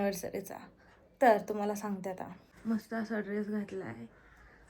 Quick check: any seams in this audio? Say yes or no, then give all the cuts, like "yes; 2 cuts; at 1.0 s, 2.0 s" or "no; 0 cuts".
yes; 1 cut; at 2.3 s